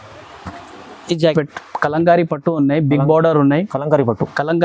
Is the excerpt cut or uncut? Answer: cut